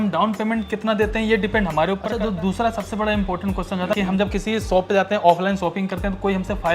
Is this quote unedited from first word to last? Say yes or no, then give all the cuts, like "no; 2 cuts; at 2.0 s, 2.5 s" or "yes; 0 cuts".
no; 2 cuts; at 2.1 s, 3.9 s